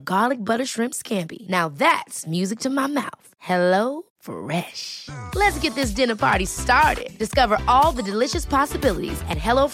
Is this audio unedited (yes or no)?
yes